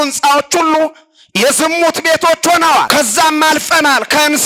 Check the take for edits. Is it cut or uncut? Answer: cut